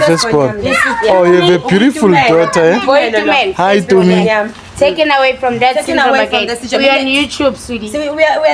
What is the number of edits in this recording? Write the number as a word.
zero